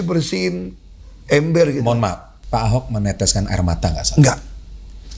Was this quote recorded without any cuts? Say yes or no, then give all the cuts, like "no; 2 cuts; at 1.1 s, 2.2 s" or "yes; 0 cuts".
no; 1 cut; at 2.3 s